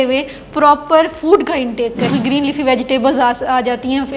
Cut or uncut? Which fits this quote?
cut